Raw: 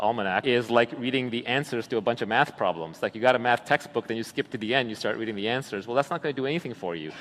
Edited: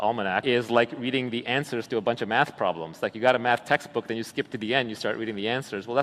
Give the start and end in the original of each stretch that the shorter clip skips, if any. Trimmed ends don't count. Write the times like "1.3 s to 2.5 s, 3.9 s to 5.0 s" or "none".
none

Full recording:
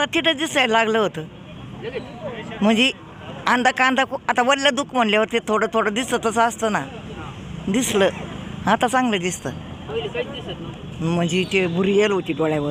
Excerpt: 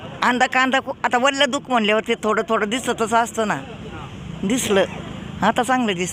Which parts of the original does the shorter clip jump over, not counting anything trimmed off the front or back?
none

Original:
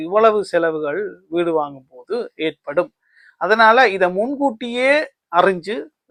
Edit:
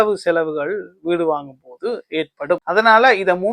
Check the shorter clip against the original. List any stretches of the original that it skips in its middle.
2.9 s to 3.4 s

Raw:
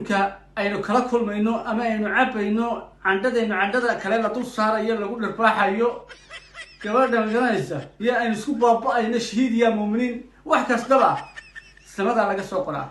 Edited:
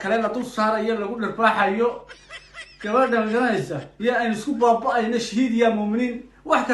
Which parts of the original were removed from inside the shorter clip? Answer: none

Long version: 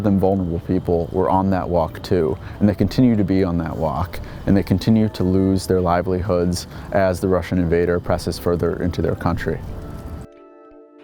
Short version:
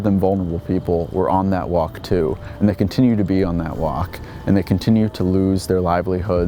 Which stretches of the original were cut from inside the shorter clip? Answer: none

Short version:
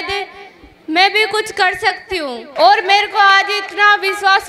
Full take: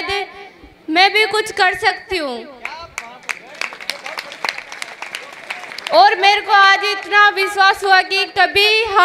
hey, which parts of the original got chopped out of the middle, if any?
2.4 s to 5.8 s

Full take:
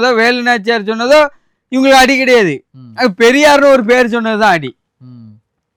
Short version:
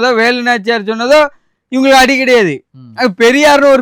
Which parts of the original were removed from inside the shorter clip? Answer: none

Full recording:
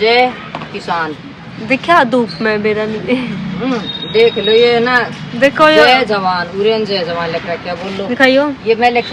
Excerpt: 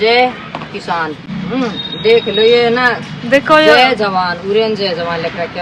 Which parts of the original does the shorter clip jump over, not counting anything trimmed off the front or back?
1.3 s to 3.4 s

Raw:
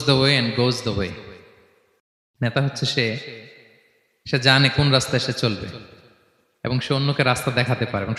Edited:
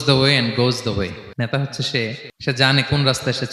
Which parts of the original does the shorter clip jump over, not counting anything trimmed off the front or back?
1.2 s to 2.3 s, 3.7 s to 4.5 s

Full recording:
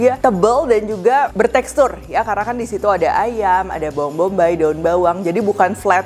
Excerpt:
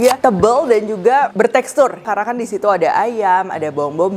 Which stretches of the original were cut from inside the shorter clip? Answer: 2.1 s to 2.3 s

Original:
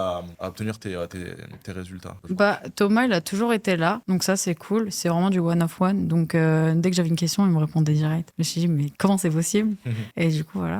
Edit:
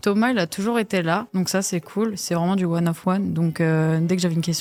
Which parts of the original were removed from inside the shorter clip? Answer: none

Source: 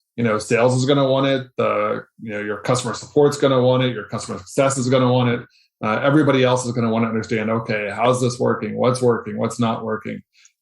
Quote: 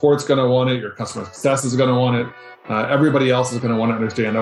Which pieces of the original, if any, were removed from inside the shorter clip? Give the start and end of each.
none

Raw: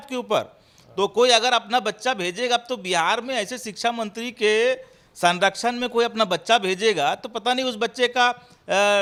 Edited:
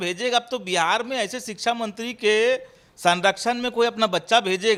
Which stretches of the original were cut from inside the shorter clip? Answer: none

